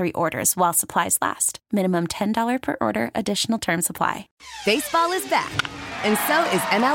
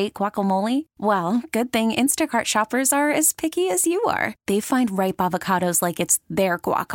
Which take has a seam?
first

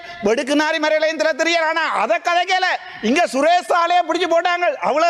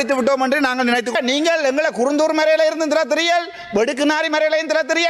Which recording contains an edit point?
second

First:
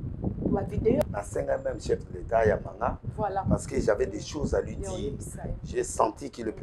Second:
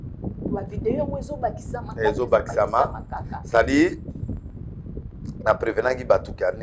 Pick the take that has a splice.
first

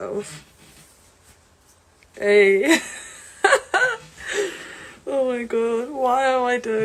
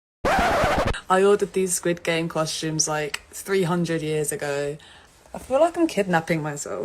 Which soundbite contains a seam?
second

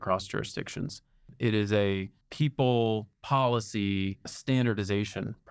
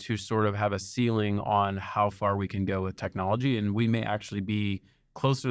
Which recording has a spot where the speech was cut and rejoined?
first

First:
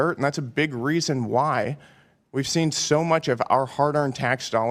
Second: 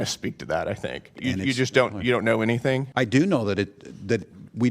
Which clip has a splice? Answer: second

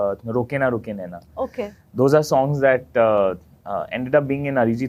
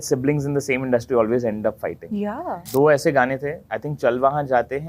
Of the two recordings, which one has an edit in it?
second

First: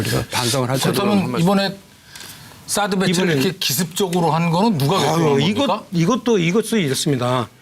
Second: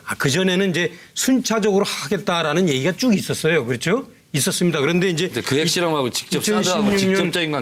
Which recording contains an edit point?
first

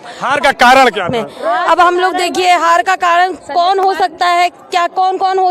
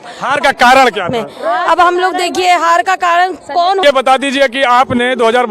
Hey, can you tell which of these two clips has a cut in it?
second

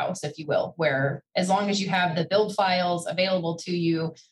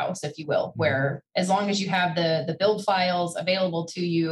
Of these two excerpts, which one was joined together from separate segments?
first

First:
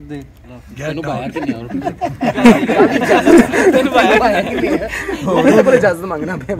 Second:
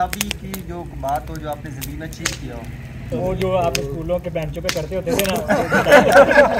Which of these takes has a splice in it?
second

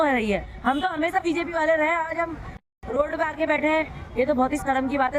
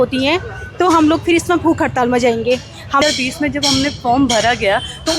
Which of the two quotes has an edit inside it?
second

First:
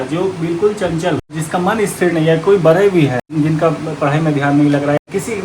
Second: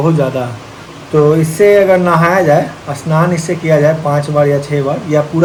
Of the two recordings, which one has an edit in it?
first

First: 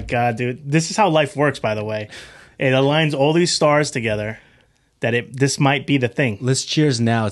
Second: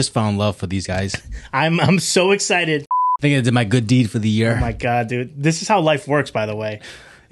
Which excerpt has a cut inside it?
second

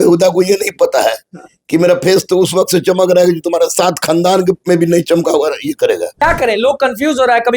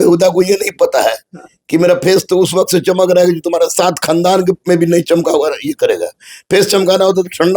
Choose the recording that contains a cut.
first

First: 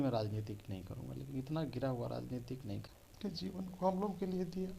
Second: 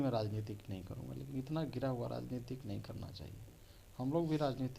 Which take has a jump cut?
first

